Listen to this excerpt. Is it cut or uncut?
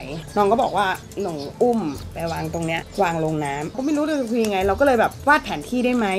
cut